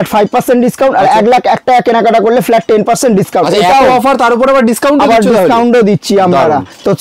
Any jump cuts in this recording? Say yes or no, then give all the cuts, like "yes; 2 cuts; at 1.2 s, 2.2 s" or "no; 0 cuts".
no; 0 cuts